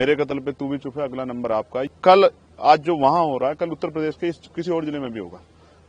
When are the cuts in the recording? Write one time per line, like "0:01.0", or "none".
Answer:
0:01.8